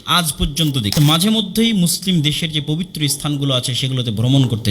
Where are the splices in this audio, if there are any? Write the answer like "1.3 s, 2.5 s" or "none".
1.0 s